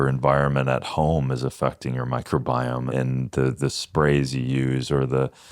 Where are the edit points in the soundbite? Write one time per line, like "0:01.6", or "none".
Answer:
0:02.9